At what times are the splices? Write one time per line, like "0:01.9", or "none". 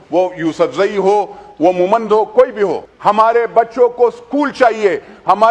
0:02.9